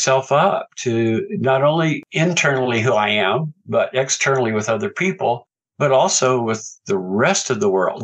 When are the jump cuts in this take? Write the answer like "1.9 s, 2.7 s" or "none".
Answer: none